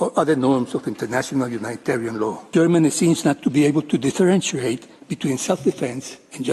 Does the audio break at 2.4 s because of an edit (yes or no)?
yes